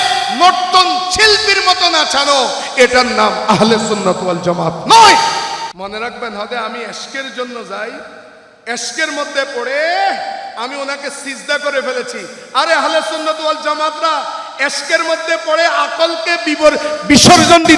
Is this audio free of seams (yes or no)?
no